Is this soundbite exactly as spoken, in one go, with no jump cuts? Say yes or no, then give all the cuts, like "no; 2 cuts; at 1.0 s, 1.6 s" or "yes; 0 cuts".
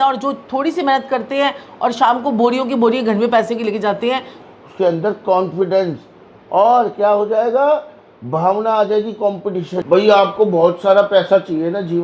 no; 2 cuts; at 4.4 s, 9.7 s